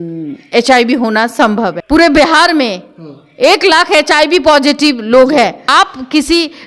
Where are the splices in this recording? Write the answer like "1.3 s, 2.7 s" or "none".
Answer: 1.8 s, 5.6 s

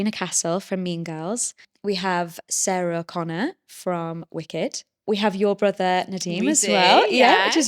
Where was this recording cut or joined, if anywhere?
1.6 s, 5.0 s

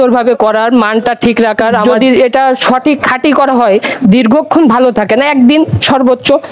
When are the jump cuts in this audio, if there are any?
1.8 s

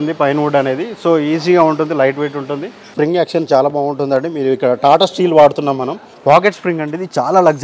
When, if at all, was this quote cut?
2.9 s, 6.1 s

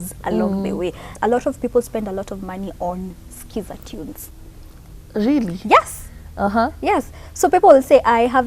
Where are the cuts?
1.1 s

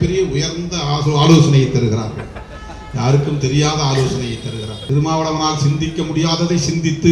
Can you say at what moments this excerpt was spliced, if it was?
4.7 s

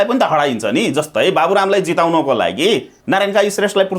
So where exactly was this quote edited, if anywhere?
2.9 s

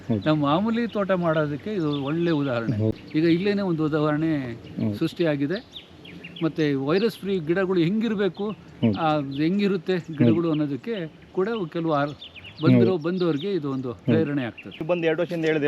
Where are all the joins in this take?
2.9 s, 14.8 s

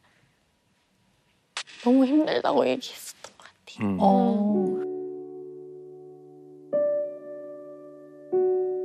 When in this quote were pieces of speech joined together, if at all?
none

